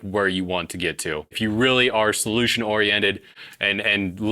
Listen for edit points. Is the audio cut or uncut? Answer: cut